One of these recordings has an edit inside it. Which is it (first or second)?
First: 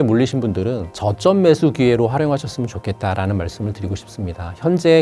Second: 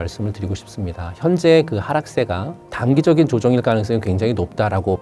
second